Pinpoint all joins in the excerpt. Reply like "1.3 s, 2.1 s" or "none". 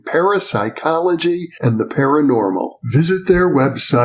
none